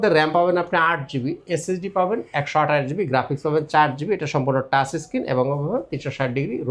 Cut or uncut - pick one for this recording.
uncut